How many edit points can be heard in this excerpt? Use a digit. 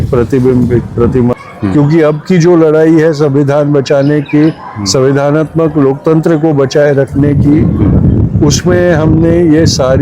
1